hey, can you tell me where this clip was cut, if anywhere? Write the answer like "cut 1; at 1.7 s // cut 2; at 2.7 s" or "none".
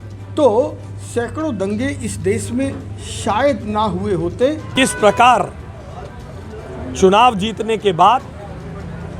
cut 1; at 4.7 s